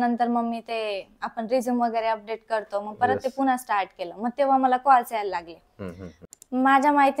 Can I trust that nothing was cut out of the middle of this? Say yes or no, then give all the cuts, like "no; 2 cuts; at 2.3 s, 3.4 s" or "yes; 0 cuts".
no; 1 cut; at 6.2 s